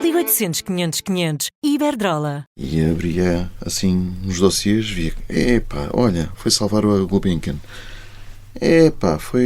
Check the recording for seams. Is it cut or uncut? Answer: cut